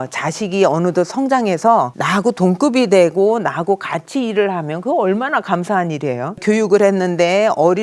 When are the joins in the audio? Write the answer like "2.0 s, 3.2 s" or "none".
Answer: 2.0 s, 6.4 s